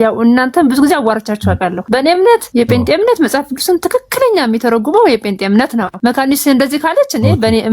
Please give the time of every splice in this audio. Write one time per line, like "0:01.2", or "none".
0:01.8
0:02.5
0:05.9